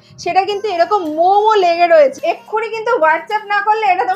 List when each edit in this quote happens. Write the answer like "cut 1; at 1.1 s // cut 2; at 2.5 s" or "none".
cut 1; at 2.1 s